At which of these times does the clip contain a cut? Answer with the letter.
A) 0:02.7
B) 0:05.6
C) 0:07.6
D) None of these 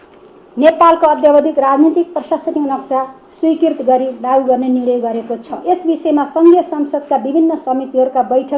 B